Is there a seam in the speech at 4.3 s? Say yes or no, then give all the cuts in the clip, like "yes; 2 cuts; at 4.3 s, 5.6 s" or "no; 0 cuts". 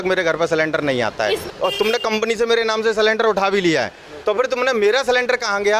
no; 1 cut; at 1.5 s